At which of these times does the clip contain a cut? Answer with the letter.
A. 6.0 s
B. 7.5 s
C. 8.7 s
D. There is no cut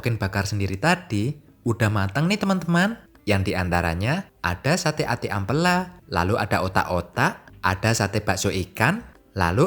B